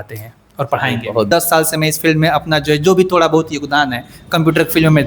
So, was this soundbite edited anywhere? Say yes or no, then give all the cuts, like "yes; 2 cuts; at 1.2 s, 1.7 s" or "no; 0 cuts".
yes; 1 cut; at 1.3 s